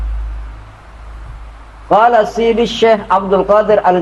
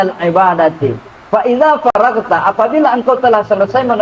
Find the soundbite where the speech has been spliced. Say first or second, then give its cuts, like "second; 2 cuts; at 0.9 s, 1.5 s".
second; 1 cut; at 1.9 s